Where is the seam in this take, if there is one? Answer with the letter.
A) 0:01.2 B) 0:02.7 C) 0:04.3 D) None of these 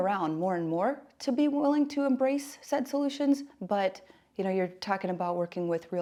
D